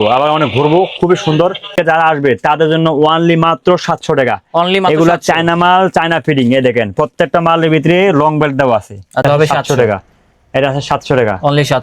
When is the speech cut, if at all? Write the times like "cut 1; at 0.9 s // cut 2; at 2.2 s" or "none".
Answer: cut 1; at 1.8 s // cut 2; at 9.2 s